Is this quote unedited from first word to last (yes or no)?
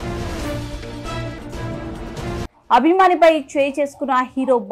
no